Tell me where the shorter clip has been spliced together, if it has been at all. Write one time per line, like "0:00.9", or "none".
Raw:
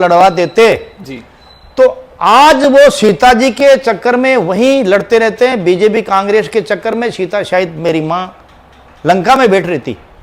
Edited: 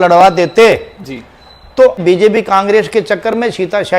0:02.0